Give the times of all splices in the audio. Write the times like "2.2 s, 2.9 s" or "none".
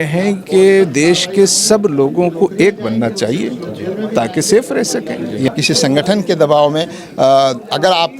5.5 s